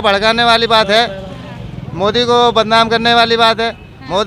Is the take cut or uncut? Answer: uncut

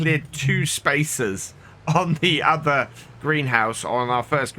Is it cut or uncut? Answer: uncut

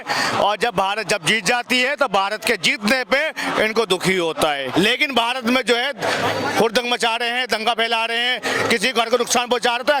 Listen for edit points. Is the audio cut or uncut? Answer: cut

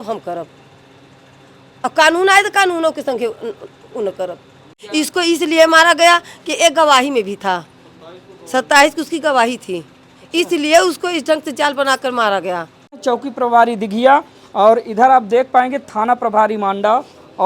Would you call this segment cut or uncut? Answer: cut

